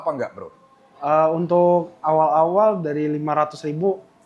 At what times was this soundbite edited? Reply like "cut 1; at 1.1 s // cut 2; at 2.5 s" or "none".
none